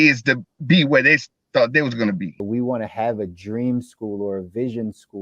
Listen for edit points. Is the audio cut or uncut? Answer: cut